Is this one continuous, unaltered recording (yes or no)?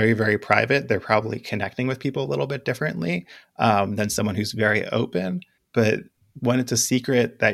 no